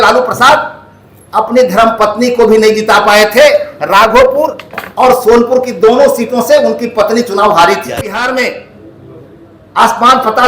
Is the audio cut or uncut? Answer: cut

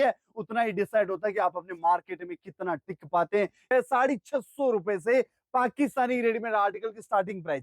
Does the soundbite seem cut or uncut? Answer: cut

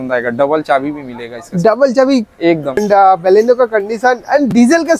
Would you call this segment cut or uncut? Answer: cut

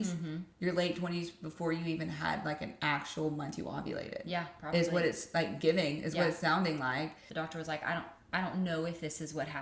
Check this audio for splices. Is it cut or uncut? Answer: cut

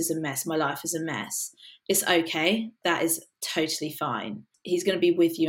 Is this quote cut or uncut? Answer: cut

